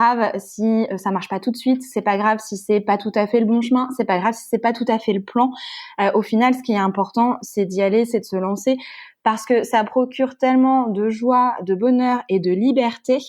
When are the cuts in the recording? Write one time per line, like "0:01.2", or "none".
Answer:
none